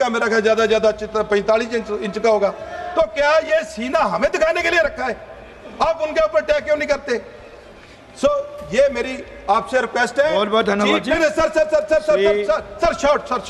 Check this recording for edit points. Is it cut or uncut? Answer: uncut